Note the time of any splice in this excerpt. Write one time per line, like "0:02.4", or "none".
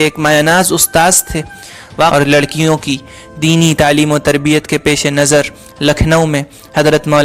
0:02.1